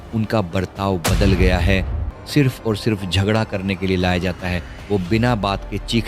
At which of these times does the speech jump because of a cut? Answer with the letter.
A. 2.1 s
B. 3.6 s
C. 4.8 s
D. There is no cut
A